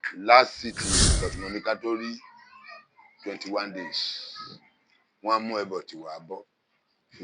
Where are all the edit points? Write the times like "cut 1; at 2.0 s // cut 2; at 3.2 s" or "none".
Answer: cut 1; at 1.1 s